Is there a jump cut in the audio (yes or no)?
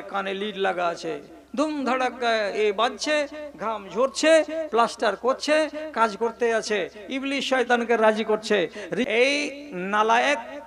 yes